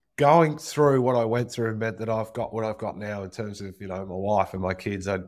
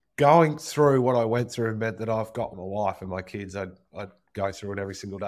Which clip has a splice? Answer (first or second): second